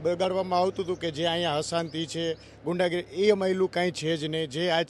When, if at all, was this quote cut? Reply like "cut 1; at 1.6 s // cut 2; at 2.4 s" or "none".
none